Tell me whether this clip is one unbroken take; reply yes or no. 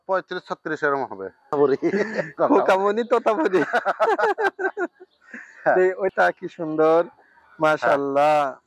no